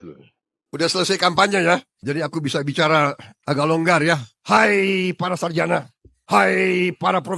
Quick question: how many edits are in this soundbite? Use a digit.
2